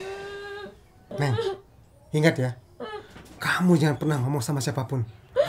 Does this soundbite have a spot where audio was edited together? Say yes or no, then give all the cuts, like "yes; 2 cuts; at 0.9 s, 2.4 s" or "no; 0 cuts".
yes; 1 cut; at 1.1 s